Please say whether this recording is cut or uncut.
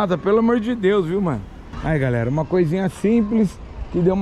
uncut